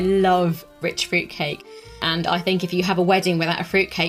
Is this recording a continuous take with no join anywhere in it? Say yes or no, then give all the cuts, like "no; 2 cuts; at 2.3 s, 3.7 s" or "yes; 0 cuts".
no; 2 cuts; at 0.8 s, 2.0 s